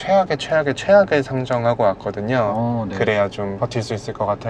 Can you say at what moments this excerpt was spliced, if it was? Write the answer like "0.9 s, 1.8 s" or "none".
3.5 s